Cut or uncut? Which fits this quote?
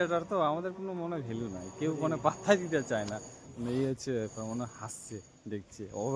uncut